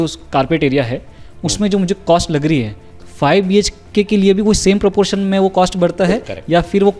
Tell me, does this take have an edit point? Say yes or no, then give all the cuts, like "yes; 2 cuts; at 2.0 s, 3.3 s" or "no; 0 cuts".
no; 0 cuts